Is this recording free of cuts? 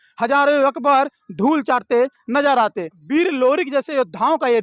no; 1 cut; at 3.0 s

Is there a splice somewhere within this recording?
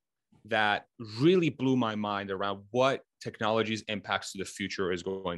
no; 0 cuts

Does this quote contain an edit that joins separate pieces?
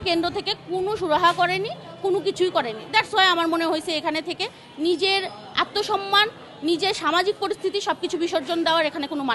no; 0 cuts

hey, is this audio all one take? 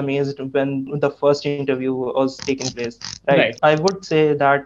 yes; 0 cuts

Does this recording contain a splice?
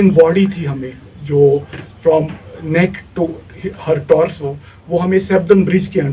no; 0 cuts

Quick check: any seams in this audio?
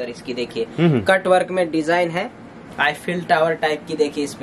no; 0 cuts

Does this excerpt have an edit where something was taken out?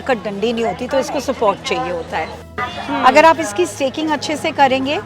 yes; 1 cut; at 2.5 s

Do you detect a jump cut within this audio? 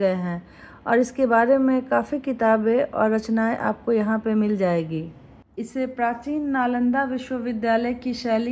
yes; 1 cut; at 5.4 s

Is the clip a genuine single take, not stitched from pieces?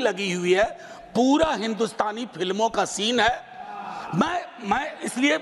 yes; 0 cuts

